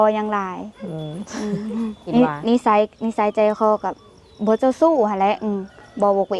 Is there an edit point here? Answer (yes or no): yes